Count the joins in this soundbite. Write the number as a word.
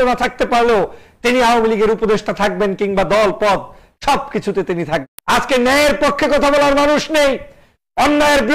one